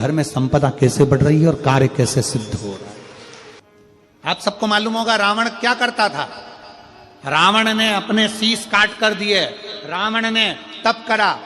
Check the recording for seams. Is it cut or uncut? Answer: cut